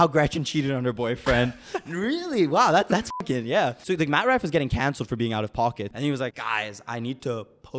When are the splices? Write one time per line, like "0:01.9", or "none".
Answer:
0:03.8
0:06.1